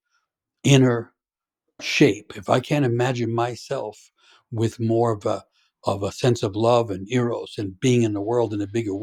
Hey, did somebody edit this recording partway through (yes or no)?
no